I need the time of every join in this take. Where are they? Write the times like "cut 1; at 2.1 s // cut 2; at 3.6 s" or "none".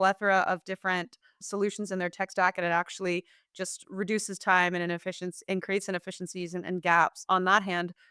cut 1; at 7.2 s